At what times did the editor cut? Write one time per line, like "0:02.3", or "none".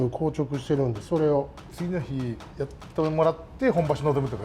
0:01.7
0:02.4